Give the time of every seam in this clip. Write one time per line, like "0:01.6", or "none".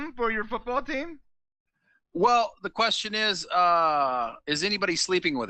none